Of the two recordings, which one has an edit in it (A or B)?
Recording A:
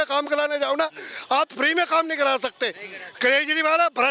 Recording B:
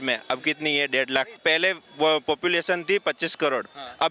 B